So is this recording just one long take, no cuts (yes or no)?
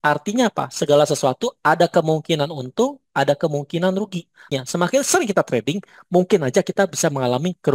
no